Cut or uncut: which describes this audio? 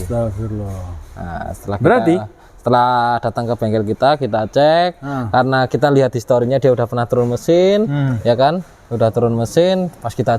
uncut